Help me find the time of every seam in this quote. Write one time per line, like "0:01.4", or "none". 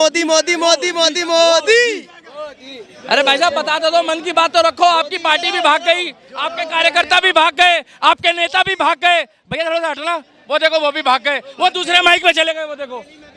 none